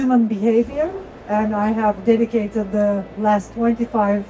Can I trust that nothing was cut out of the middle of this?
yes; 0 cuts

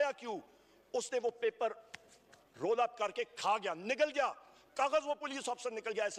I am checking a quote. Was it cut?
no; 0 cuts

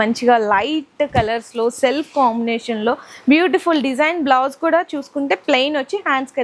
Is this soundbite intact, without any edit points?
yes; 0 cuts

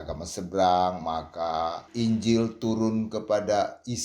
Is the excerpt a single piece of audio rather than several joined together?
no; 1 cut; at 1.8 s

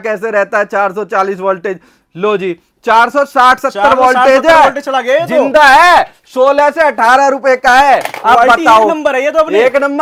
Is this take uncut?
yes; 0 cuts

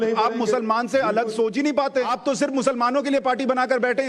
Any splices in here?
yes; 1 cut; at 2.2 s

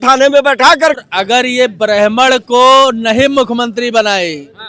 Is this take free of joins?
no; 1 cut; at 1.0 s

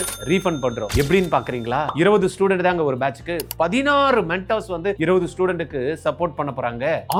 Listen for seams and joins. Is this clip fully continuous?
yes; 0 cuts

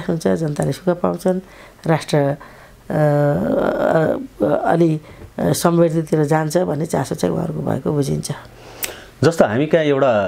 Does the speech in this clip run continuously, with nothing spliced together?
yes; 0 cuts

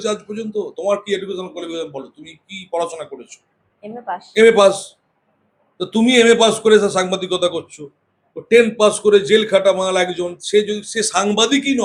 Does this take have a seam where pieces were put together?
no; 0 cuts

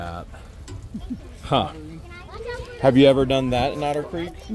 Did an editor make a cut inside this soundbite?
no; 0 cuts

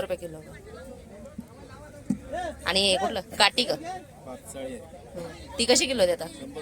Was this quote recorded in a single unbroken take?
yes; 0 cuts

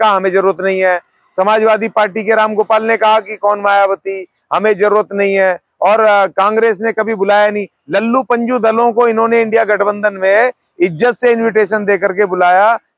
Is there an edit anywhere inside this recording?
no; 0 cuts

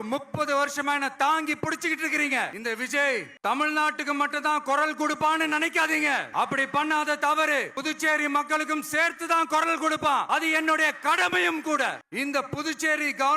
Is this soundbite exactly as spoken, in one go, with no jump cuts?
no; 5 cuts; at 3.0 s, 6.3 s, 7.7 s, 10.3 s, 12.0 s

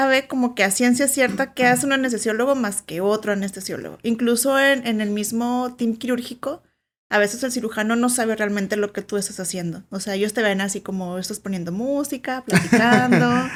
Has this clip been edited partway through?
no; 0 cuts

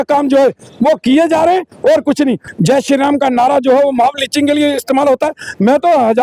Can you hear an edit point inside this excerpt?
yes; 1 cut; at 2.5 s

